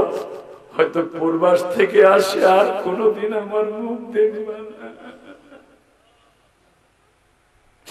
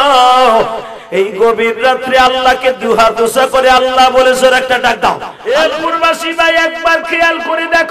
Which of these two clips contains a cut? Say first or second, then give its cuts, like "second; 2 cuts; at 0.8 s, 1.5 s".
second; 1 cut; at 5.3 s